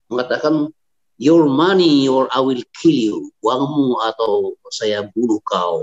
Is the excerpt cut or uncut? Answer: uncut